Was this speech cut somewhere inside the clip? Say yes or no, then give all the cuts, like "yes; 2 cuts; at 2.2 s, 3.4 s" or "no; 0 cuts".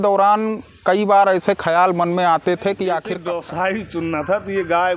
yes; 1 cut; at 3.2 s